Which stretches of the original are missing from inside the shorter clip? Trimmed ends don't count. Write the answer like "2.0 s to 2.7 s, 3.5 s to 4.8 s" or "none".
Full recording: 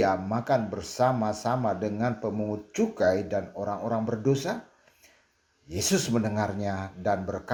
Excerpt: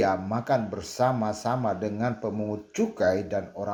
none